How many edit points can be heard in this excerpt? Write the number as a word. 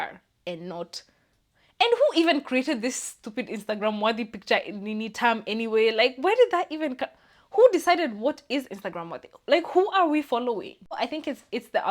one